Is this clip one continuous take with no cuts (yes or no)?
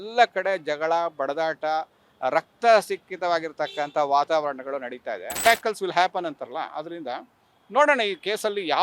no